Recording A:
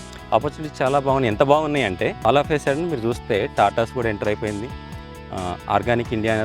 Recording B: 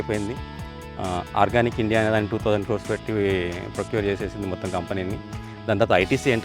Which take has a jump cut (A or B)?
A